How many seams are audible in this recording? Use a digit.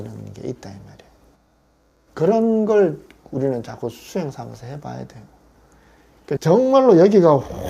1